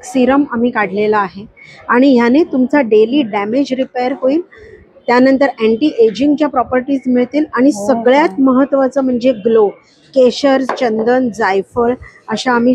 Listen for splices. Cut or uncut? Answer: uncut